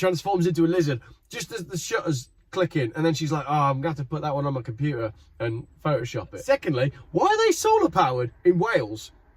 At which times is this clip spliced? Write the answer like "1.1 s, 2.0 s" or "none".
6.4 s

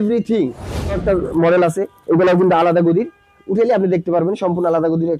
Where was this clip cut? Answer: 1.0 s

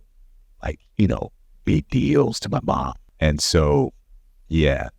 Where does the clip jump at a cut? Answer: 3.0 s

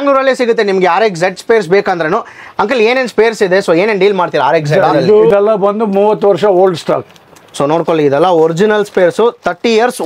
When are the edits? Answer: 5.3 s

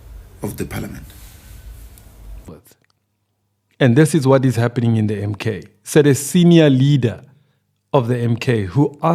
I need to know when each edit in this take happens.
2.5 s

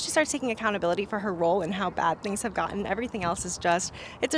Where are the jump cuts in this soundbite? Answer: none

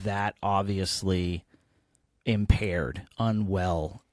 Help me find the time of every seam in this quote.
none

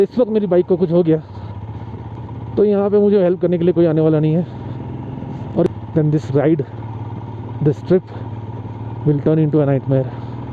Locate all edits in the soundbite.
5.7 s

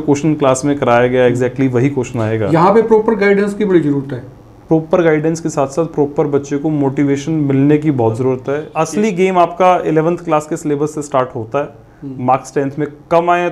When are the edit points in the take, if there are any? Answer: 8.7 s

